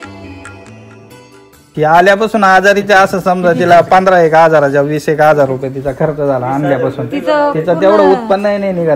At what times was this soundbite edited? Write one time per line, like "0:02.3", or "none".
0:01.6